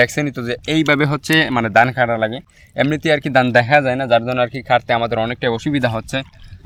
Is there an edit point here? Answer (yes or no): no